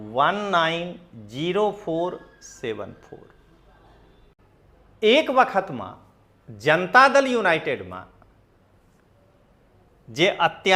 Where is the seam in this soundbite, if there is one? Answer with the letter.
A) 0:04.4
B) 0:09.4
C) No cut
A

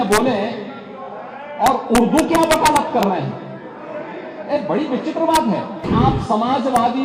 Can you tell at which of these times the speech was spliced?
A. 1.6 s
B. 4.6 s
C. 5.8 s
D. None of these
C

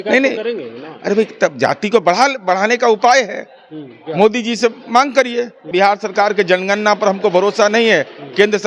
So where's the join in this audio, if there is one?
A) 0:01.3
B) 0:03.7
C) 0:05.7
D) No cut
C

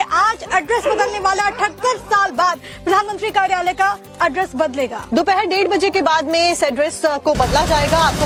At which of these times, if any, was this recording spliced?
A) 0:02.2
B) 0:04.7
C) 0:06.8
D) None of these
D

